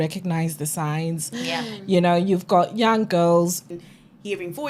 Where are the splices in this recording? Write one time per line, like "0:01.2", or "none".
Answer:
0:03.7